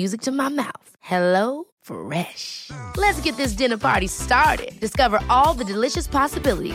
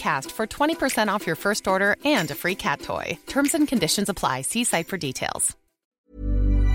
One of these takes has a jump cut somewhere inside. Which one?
second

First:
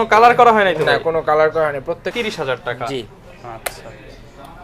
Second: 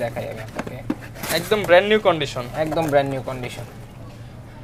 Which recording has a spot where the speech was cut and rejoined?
first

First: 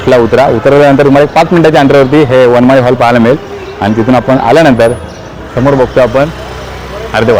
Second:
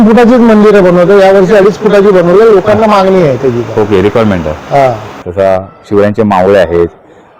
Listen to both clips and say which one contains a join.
second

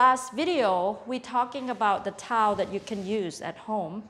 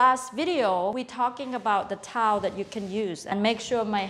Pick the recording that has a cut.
second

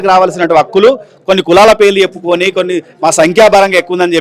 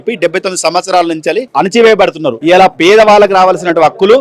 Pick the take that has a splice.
second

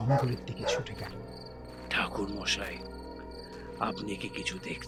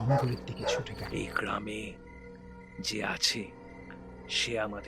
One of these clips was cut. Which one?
second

